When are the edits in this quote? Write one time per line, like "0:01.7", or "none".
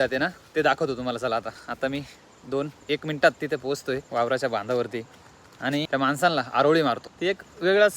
0:01.6
0:04.1
0:05.9
0:07.1